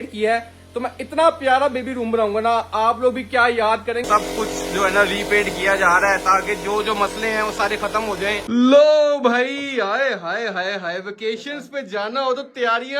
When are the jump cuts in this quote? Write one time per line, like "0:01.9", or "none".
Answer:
0:04.0
0:08.4